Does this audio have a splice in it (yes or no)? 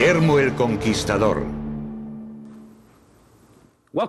yes